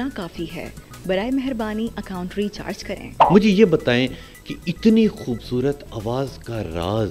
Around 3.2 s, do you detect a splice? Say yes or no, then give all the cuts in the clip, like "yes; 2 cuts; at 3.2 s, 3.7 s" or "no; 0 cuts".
yes; 1 cut; at 3.2 s